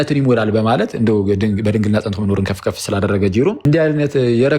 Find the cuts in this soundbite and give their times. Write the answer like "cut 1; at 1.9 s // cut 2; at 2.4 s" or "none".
cut 1; at 3.6 s